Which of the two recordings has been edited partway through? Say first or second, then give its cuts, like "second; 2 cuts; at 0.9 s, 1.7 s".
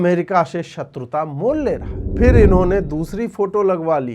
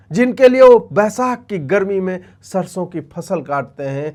first; 1 cut; at 2.0 s